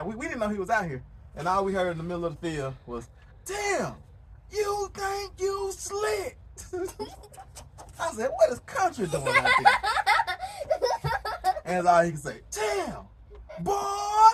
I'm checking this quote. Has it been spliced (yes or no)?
no